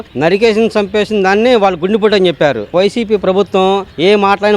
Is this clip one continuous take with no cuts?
no; 1 cut; at 2.7 s

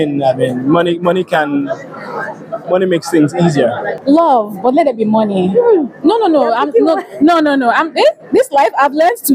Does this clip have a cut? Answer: yes; 1 cut; at 3.9 s

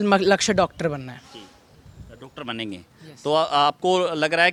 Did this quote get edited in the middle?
no; 0 cuts

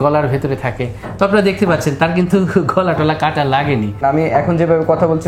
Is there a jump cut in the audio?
yes; 1 cut; at 4.0 s

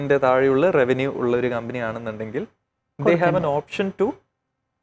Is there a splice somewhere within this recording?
no; 0 cuts

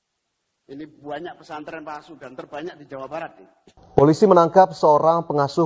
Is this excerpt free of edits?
no; 1 cut; at 3.8 s

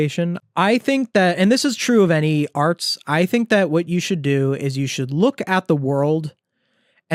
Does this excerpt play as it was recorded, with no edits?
yes; 0 cuts

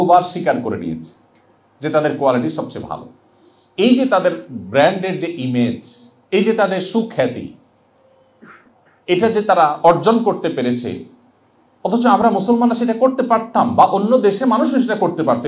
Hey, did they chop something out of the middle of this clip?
no; 0 cuts

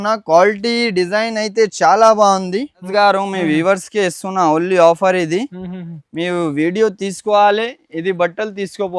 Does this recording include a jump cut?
yes; 1 cut; at 2.9 s

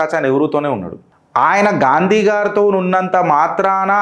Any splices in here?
no; 0 cuts

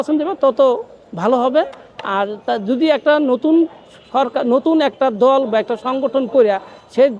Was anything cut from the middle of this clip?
no; 0 cuts

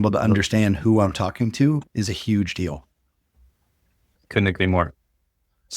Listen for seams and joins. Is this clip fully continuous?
no; 1 cut; at 4.2 s

